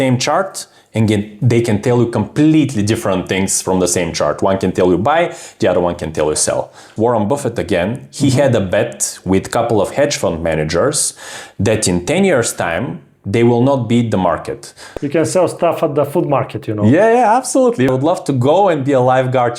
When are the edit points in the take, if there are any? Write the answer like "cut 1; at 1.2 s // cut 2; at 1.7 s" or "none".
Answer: cut 1; at 6.9 s // cut 2; at 14.8 s // cut 3; at 17.9 s